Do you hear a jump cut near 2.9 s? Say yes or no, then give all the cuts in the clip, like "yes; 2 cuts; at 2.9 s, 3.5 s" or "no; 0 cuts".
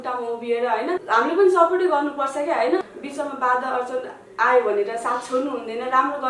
yes; 2 cuts; at 1.0 s, 2.9 s